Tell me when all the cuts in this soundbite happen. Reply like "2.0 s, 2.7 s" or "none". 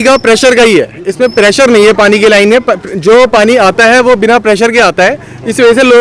none

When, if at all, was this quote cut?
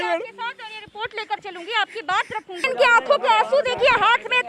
2.7 s

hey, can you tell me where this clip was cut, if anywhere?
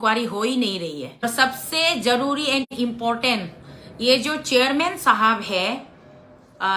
1.2 s

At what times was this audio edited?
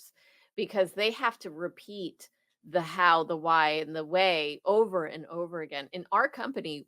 2.6 s

